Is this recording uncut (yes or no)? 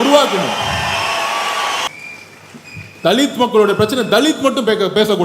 no